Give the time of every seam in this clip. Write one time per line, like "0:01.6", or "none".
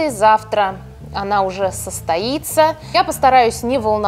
0:02.8

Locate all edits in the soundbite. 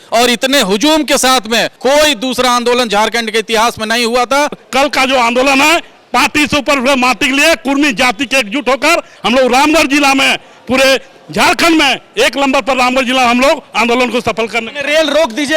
0:01.7
0:04.6

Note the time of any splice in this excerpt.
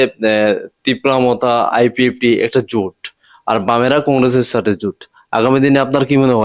none

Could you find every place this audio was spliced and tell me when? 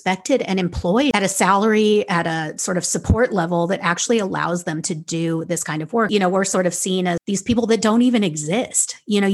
0:01.1
0:06.1
0:07.2

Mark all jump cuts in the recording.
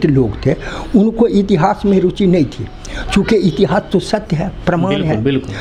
none

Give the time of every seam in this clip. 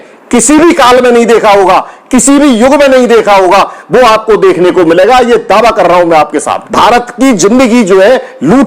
0:06.6

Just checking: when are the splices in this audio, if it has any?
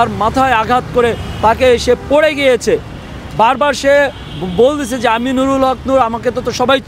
none

